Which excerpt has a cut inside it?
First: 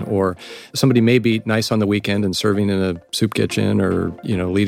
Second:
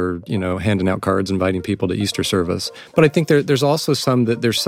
second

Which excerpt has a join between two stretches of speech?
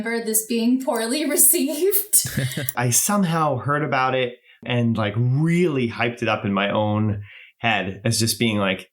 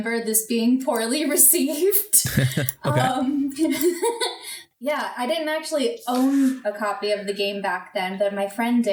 first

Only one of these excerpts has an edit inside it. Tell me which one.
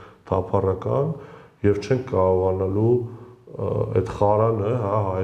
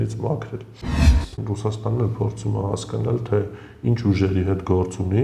second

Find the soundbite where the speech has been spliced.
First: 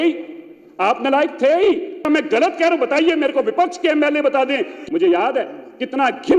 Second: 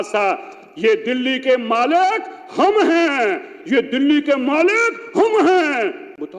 first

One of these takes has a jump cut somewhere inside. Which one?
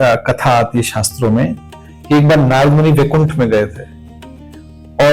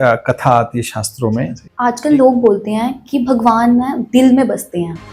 second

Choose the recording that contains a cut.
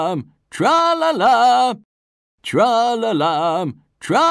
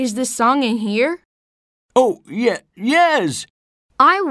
first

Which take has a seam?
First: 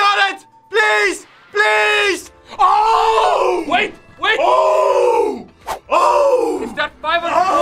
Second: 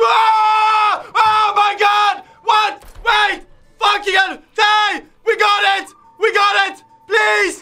first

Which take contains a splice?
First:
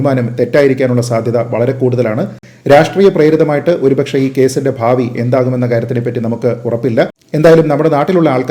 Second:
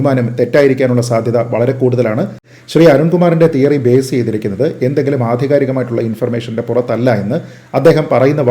second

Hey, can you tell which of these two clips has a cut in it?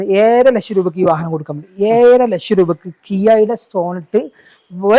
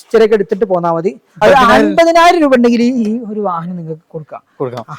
second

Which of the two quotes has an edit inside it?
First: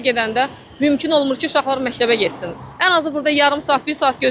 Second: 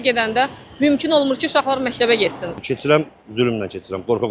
second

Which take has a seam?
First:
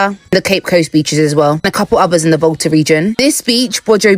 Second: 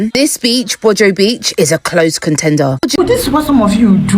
second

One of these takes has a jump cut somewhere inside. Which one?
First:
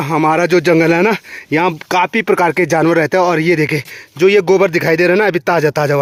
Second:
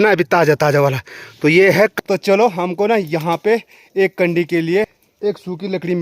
second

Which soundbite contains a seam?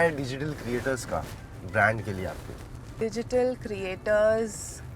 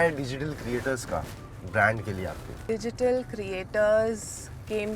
second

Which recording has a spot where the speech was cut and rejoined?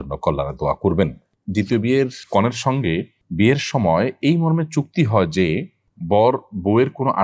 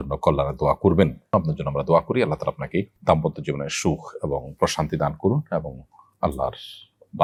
first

